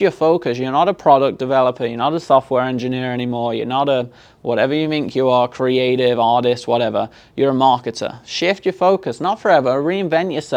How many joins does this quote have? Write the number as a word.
zero